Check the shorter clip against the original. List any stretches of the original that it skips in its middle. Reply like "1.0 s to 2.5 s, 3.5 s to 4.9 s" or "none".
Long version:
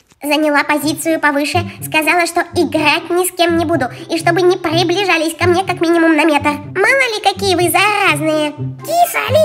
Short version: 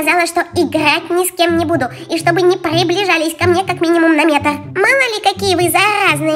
none